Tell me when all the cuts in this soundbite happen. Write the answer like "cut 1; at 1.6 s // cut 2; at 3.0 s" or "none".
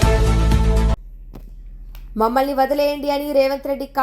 cut 1; at 0.9 s